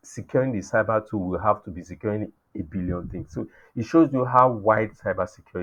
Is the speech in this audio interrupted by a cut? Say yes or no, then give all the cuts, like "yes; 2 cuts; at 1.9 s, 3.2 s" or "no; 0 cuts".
no; 0 cuts